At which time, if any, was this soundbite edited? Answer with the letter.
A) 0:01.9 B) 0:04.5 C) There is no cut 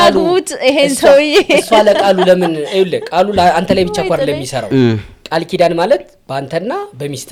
C